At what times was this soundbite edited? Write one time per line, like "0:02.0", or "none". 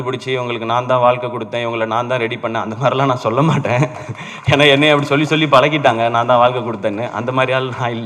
none